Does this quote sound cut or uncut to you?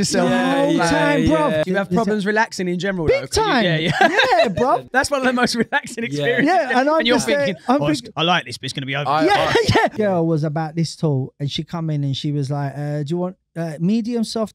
cut